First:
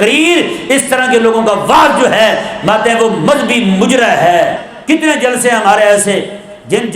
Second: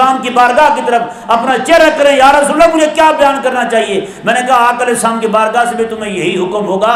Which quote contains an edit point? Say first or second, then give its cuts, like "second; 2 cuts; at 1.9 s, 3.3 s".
first; 1 cut; at 4.7 s